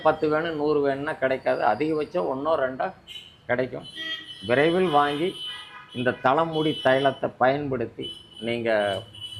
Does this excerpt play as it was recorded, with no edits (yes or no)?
yes